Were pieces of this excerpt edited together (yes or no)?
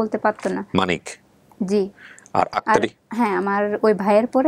no